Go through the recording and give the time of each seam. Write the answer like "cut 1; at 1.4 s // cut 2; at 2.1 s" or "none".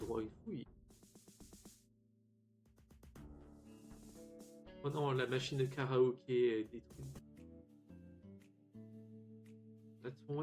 cut 1; at 7.2 s